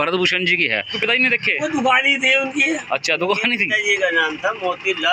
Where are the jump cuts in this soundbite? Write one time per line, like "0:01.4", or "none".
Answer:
0:00.9